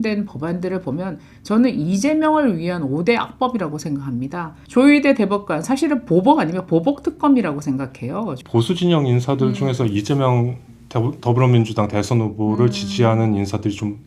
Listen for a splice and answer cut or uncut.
cut